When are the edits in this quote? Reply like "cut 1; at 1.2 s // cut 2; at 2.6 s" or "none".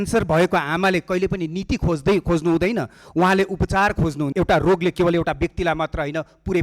cut 1; at 4.2 s